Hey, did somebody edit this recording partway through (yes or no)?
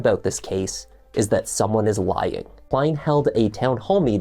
yes